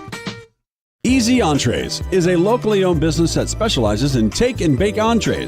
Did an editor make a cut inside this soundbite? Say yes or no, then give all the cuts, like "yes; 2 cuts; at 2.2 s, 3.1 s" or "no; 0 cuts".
yes; 1 cut; at 1.6 s